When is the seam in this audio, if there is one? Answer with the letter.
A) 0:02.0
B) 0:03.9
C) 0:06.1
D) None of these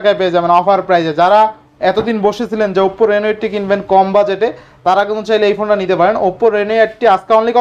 D